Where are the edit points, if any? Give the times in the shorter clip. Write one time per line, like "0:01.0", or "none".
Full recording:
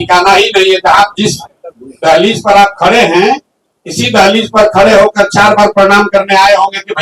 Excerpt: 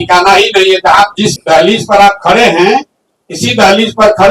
0:01.4